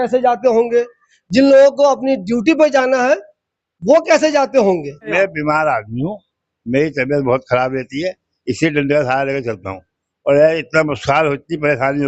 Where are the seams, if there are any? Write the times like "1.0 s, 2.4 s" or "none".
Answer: 5.0 s